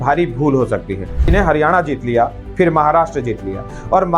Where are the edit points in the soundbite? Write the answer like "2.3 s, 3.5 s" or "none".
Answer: 1.3 s